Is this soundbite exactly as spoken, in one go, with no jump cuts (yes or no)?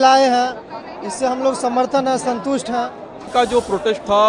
no